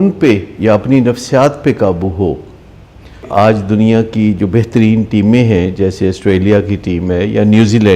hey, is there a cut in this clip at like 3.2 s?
yes; 1 cut; at 3.2 s

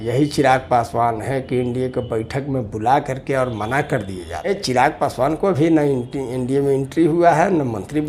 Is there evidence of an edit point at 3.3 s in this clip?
no; 1 cut; at 4.5 s

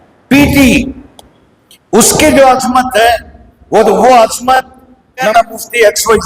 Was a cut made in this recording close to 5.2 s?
yes; 1 cut; at 5.2 s

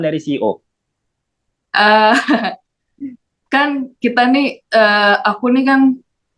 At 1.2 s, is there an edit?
no; 0 cuts

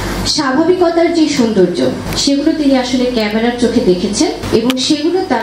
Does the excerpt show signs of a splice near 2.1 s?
yes; 2 cuts; at 2.1 s, 4.4 s

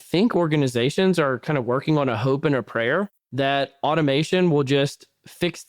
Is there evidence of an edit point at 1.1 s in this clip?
no; 1 cut; at 3.2 s

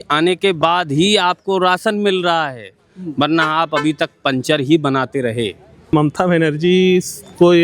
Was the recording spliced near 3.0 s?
no; 1 cut; at 5.9 s

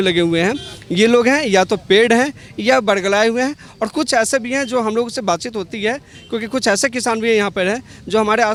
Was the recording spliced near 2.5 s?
no; 0 cuts

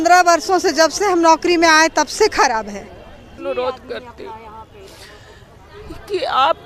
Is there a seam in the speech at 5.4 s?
no; 1 cut; at 3.3 s

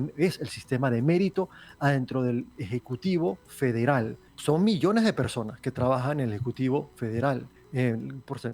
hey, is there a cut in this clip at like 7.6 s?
yes; 2 cuts; at 4.2 s, 7.6 s

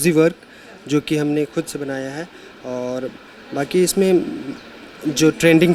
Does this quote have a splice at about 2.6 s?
no; 0 cuts

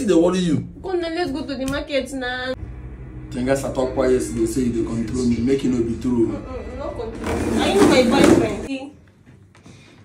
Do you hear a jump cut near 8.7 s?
yes; 2 cuts; at 2.6 s, 8.7 s

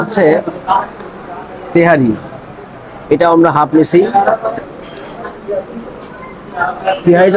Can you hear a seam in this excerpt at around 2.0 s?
no; 1 cut; at 4.7 s

